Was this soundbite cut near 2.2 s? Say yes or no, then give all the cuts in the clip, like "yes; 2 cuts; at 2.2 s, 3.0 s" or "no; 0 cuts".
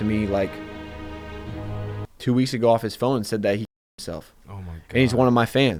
no; 0 cuts